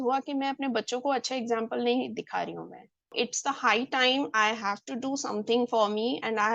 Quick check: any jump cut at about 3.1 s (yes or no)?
yes